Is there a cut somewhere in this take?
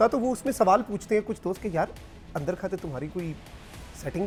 no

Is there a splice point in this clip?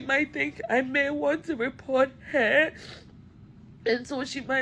no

